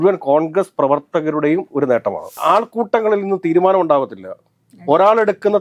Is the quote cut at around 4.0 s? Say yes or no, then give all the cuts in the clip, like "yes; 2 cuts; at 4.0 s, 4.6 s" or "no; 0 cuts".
no; 1 cut; at 2.4 s